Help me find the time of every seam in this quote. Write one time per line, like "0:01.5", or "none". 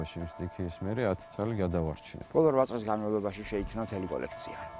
0:02.1